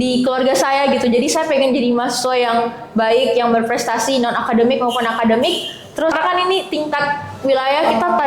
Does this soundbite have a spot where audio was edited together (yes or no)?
yes